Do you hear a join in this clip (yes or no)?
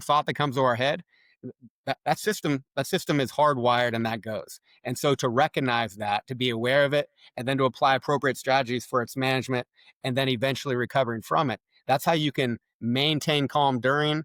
no